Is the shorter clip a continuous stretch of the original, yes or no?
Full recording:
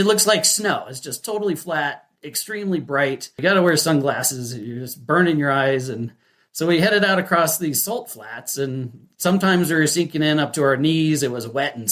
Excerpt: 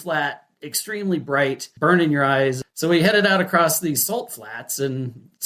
no